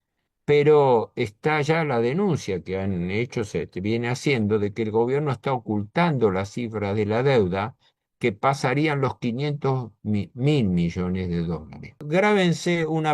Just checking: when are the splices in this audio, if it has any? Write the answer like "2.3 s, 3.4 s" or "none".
12.0 s